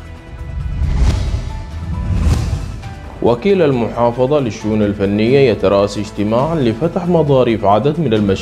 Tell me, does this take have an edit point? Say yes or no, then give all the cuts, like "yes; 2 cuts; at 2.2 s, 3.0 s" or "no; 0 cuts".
no; 0 cuts